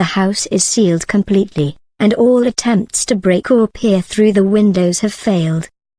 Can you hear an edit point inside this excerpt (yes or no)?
no